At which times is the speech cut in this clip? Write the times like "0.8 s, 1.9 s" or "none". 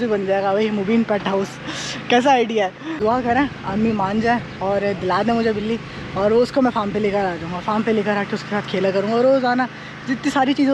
none